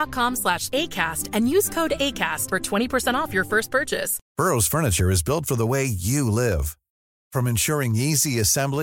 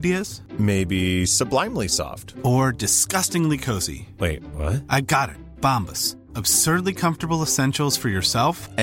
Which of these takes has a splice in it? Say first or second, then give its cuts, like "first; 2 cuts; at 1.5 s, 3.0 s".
first; 1 cut; at 4.2 s